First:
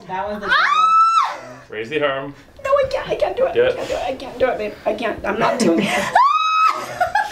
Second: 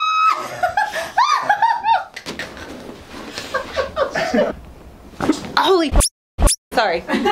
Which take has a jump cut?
second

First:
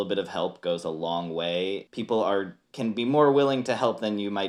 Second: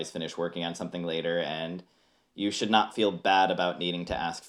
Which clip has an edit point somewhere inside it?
first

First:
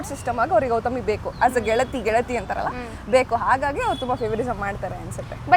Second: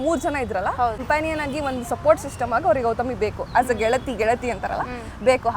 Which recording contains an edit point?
second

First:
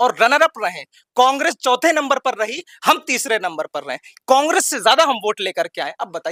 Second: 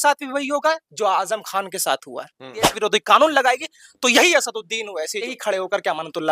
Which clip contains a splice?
second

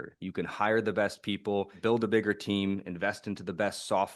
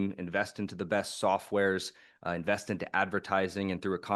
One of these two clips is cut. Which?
first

